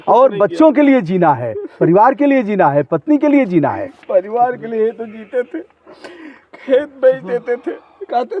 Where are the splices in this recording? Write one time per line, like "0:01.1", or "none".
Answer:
none